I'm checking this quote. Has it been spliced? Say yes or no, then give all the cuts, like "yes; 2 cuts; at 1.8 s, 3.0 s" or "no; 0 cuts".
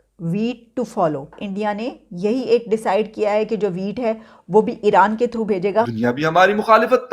yes; 2 cuts; at 1.4 s, 5.9 s